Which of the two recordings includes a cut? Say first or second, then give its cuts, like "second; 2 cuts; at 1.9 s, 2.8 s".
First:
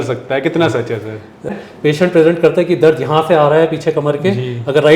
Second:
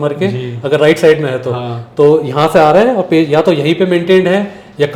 first; 1 cut; at 1.5 s